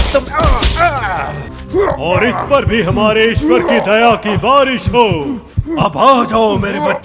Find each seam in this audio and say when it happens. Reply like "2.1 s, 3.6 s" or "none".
1.4 s